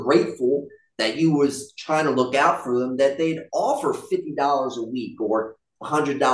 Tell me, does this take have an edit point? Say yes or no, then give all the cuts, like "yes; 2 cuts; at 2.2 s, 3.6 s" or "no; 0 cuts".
no; 0 cuts